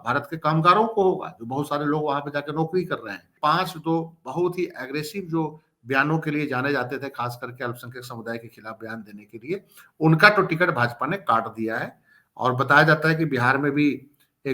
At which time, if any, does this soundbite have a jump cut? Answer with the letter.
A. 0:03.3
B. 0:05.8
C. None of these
A